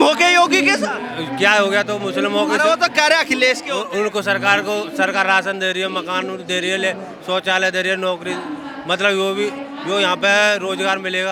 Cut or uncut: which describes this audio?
uncut